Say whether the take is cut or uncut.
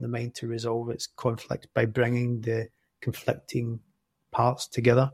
uncut